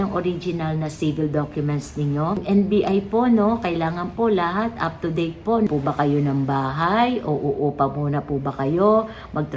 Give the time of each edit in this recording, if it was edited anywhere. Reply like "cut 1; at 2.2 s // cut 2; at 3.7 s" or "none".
cut 1; at 2.4 s // cut 2; at 5.7 s

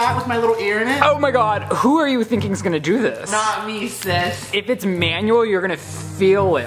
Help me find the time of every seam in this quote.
cut 1; at 3.2 s // cut 2; at 4.4 s

